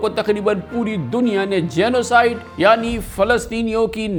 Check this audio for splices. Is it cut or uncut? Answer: uncut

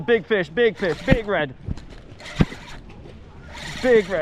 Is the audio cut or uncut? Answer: uncut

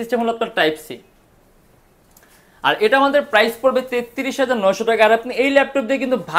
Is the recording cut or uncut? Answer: uncut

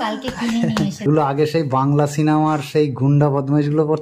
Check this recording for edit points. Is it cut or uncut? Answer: cut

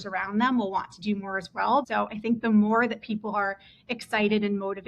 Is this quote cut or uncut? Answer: cut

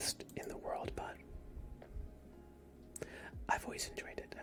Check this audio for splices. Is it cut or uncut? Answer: uncut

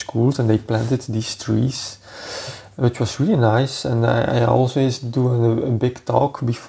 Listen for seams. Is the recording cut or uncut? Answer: uncut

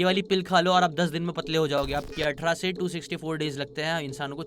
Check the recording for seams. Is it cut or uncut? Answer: cut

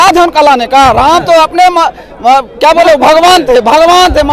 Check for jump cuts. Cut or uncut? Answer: uncut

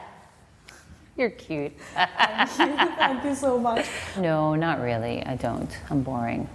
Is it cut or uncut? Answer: cut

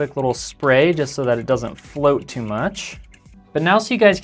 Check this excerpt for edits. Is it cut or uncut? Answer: cut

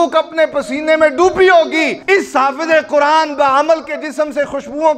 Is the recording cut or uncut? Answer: cut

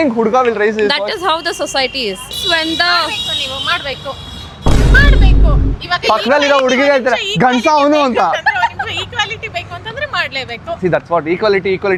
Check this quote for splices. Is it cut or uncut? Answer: uncut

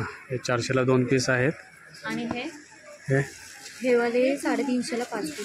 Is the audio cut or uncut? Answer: uncut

